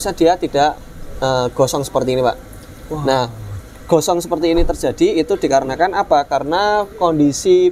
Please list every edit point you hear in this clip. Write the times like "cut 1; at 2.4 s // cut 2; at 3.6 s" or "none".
none